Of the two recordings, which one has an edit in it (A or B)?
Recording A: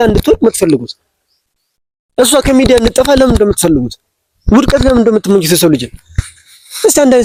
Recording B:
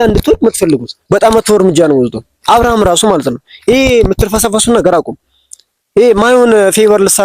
B